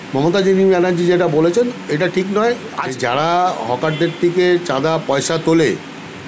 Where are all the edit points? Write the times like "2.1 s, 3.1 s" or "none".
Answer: 2.8 s